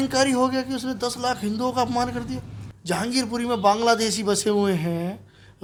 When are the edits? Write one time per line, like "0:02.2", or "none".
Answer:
none